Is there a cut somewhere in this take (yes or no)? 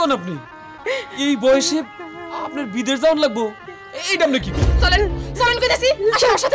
yes